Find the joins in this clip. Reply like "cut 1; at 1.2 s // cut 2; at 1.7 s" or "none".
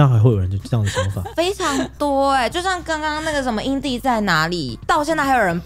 none